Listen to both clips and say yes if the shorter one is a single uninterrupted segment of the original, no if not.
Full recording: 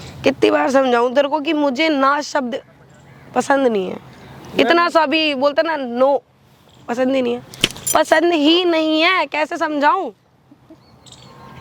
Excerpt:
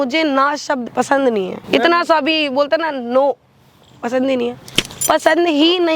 no